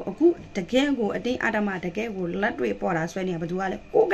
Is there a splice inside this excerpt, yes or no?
no